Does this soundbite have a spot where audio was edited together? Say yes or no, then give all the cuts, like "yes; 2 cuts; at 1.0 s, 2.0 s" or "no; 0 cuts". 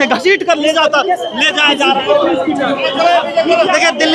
yes; 1 cut; at 2.0 s